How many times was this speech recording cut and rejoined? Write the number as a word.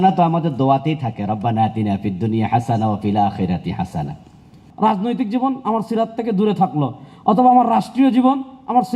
one